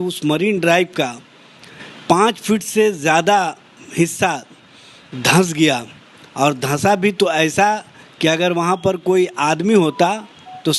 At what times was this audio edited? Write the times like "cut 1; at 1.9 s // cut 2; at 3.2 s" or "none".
none